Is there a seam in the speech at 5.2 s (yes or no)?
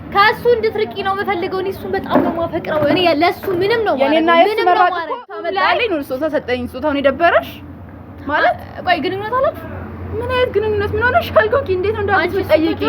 yes